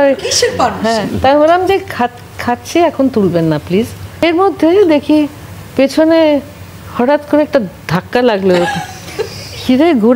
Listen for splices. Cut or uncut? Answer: cut